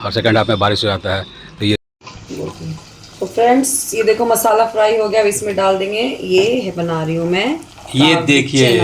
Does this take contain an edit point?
yes; 1 cut; at 1.8 s

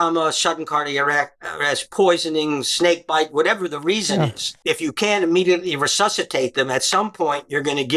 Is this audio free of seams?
no; 1 cut; at 4.5 s

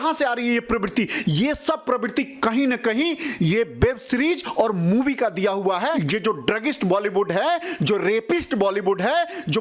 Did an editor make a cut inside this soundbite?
yes; 1 cut; at 6.0 s

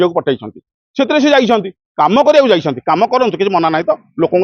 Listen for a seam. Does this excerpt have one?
no; 0 cuts

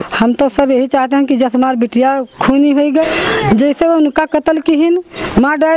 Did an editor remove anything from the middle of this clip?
yes; 1 cut; at 3.1 s

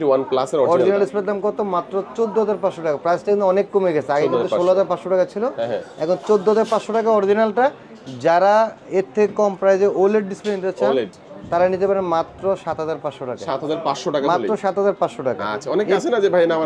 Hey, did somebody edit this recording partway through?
no; 0 cuts

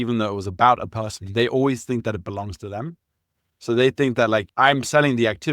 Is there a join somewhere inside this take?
yes; 1 cut; at 4.5 s

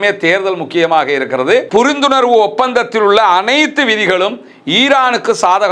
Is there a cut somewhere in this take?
yes; 1 cut; at 1.7 s

